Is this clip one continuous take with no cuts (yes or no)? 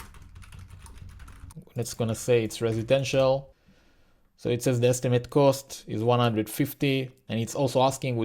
no